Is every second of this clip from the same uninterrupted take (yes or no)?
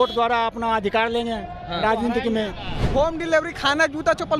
no